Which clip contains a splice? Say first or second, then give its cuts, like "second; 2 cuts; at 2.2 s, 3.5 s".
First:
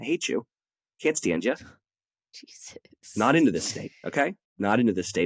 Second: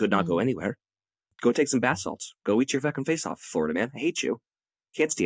second; 1 cut; at 1.3 s